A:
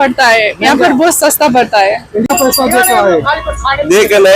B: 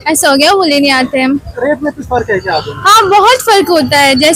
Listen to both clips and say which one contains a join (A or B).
A